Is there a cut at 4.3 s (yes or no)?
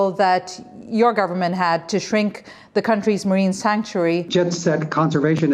yes